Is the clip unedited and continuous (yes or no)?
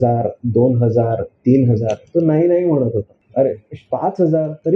no